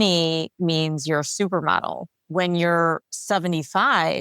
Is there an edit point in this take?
yes; 2 cuts; at 2.1 s, 3.1 s

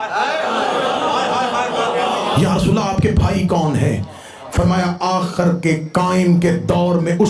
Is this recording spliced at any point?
no; 0 cuts

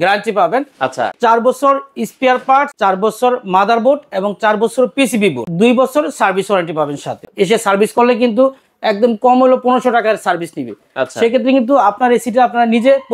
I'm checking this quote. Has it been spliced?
yes; 4 cuts; at 1.1 s, 2.7 s, 5.5 s, 7.2 s

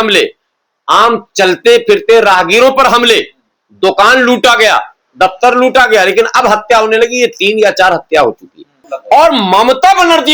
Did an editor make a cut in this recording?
yes; 1 cut; at 8.9 s

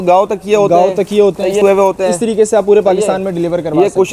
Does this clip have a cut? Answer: yes; 1 cut; at 1.6 s

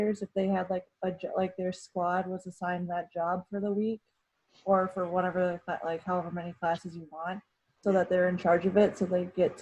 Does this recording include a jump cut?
no; 0 cuts

